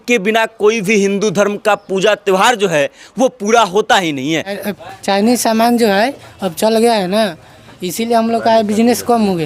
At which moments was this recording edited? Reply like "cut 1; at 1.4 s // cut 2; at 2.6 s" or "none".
cut 1; at 4.6 s